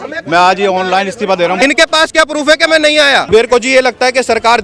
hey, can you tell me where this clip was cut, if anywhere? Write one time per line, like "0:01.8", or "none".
0:01.6
0:03.3